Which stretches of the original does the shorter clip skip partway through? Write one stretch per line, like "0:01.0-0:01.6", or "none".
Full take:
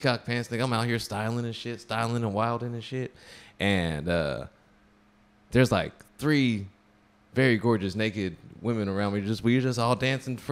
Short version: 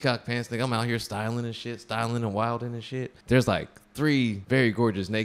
0:03.1-0:05.4
0:06.6-0:07.3

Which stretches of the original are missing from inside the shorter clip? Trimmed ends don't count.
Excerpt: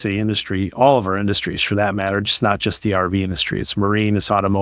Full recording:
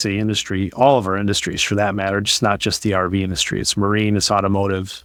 none

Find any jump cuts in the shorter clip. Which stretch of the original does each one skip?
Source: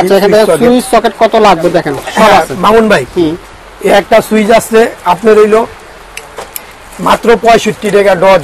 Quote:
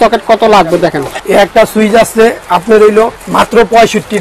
0:02.0-0:03.6
0:05.8-0:06.9

